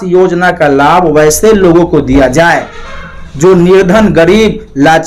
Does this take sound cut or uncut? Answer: uncut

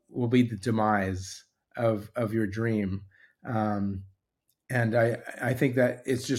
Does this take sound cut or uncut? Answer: uncut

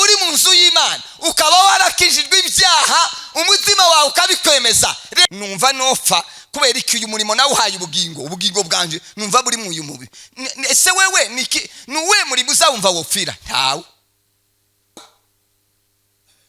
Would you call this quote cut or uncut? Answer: cut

